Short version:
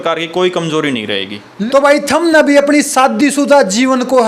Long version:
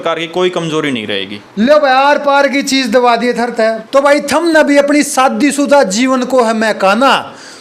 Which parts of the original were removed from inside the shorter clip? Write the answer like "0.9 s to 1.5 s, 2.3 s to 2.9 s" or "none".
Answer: 1.5 s to 3.7 s